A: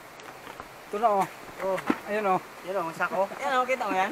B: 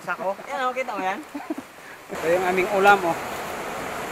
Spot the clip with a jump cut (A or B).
B